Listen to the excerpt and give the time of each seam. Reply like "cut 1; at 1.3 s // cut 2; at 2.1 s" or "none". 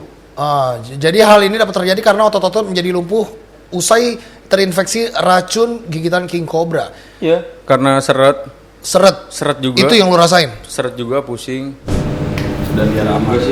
cut 1; at 11.9 s